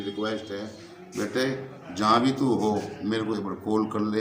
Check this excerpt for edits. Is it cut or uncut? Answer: uncut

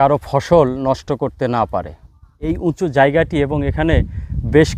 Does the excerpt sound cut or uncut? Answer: cut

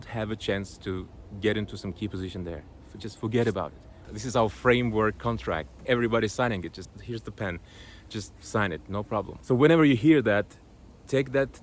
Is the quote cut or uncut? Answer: cut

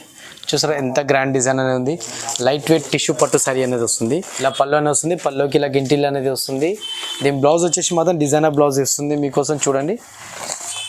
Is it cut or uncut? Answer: cut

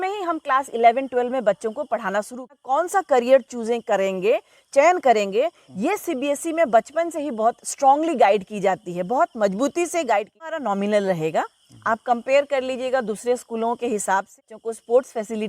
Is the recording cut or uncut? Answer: cut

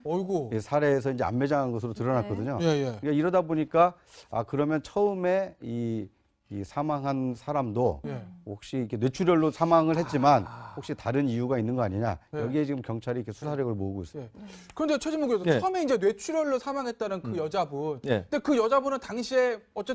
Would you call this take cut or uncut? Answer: cut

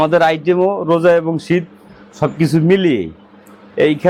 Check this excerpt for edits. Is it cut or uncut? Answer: uncut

